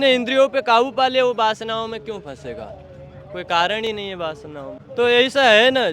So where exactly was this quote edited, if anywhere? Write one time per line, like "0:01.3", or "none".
0:04.8